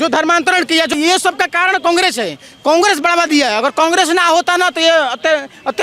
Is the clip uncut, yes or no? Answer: no